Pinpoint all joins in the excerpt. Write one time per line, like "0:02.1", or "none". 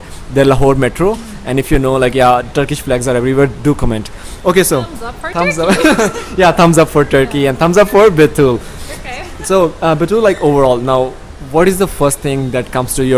none